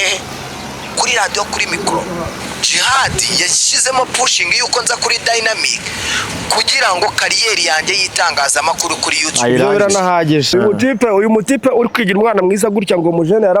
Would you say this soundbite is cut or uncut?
cut